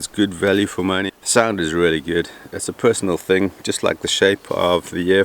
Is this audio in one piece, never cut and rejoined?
no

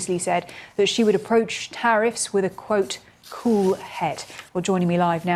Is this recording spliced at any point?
no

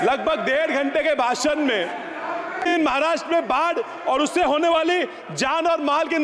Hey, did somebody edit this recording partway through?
yes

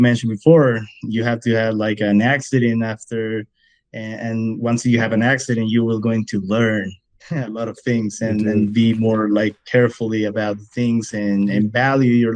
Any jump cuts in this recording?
no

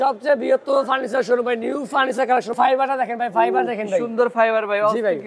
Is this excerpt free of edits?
no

